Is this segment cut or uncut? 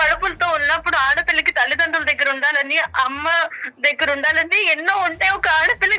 uncut